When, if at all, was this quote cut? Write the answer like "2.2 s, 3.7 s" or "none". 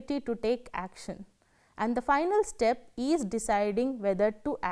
none